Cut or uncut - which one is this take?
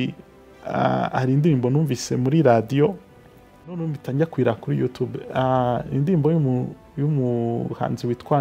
cut